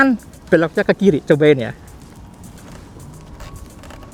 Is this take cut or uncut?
uncut